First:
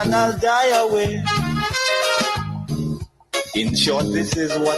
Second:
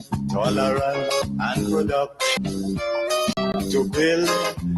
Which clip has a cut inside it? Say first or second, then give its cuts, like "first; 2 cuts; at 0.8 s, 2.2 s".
second; 3 cuts; at 1.2 s, 2.3 s, 3.4 s